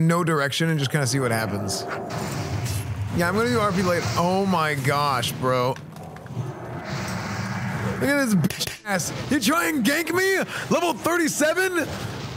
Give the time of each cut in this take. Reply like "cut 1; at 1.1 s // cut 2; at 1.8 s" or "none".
none